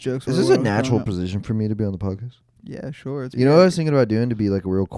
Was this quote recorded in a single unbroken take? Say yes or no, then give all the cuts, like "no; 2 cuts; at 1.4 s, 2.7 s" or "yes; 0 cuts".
no; 1 cut; at 3.3 s